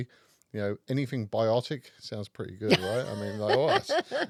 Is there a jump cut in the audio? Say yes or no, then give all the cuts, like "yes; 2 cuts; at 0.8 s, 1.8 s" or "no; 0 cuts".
no; 0 cuts